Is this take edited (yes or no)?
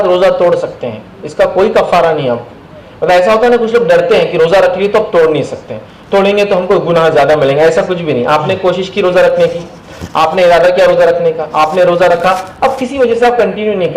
no